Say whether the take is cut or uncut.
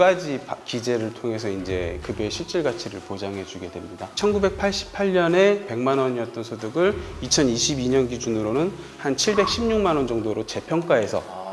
cut